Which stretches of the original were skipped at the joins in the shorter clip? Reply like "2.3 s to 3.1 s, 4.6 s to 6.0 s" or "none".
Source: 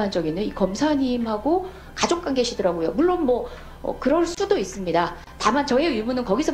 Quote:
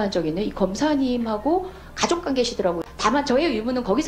2.8 s to 5.2 s

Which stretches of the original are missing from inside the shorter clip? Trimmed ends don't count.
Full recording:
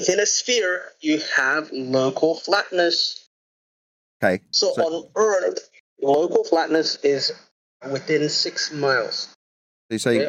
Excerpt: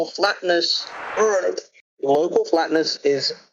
3.3 s to 5.0 s

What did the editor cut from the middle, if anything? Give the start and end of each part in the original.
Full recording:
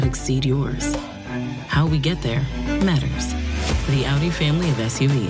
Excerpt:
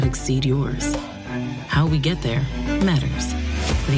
none

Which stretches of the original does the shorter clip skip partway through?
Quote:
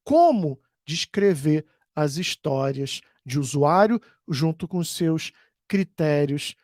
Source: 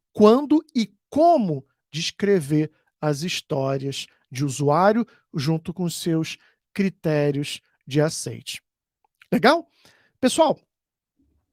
none

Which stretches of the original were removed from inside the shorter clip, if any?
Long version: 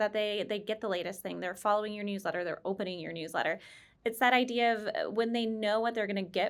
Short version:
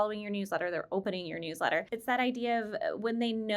3.6 s to 4.0 s

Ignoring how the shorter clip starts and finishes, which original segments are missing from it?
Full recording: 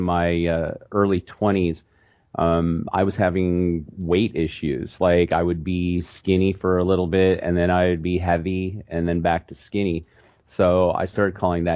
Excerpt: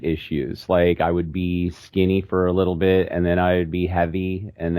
none

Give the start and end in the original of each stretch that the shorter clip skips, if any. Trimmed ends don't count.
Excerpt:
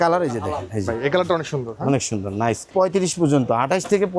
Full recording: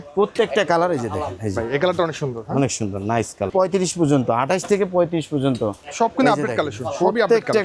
3.4 s to 3.5 s

